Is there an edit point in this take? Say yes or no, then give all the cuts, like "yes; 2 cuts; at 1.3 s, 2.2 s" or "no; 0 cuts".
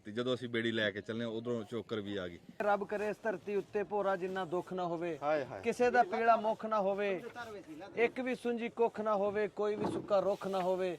yes; 1 cut; at 2.6 s